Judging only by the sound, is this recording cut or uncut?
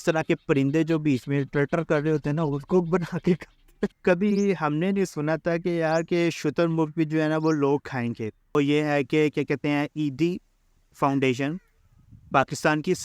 cut